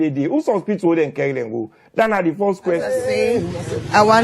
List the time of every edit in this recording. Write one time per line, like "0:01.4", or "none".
0:03.0